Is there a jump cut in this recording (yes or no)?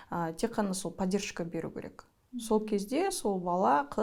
no